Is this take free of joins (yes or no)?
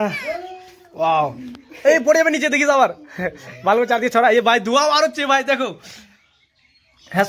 yes